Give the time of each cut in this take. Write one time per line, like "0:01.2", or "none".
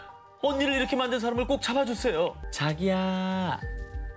0:02.5